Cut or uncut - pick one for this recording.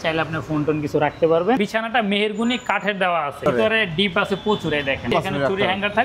cut